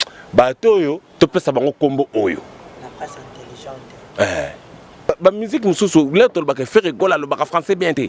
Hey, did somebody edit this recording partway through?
yes; 1 cut; at 5.1 s

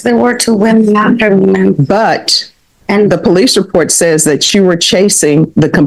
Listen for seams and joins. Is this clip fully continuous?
yes; 0 cuts

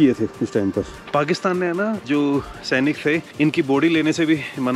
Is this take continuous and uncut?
no; 2 cuts; at 0.9 s, 2.0 s

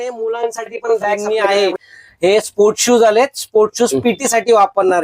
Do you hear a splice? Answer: yes; 1 cut; at 1.4 s

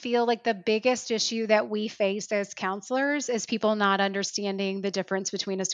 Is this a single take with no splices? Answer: yes; 0 cuts

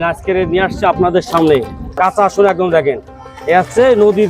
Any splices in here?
yes; 1 cut; at 2.0 s

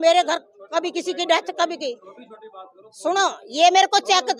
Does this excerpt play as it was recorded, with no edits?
yes; 0 cuts

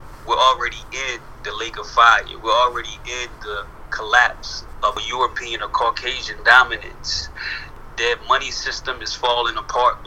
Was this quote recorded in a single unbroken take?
yes; 0 cuts

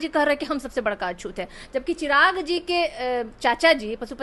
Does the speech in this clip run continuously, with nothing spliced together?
yes; 0 cuts

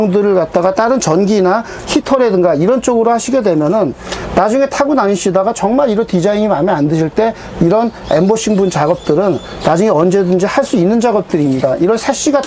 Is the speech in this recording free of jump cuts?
yes; 0 cuts

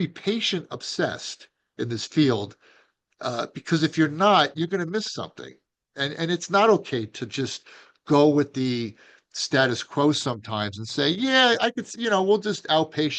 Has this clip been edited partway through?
no; 0 cuts

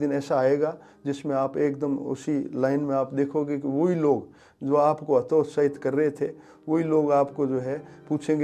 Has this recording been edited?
no; 0 cuts

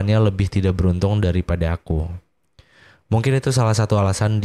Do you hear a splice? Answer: no; 0 cuts

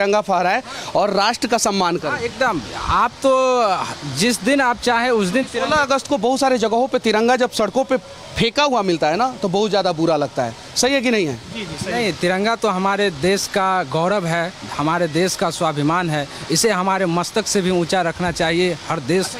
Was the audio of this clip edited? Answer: no; 0 cuts

